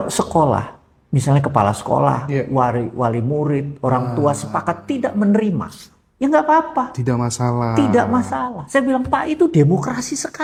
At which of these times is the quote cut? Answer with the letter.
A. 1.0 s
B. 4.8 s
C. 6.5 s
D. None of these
D